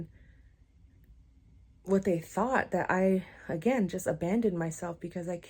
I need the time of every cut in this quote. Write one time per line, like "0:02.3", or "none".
none